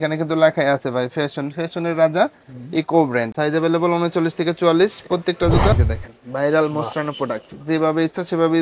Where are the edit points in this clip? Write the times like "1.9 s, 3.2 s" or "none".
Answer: 3.3 s, 5.8 s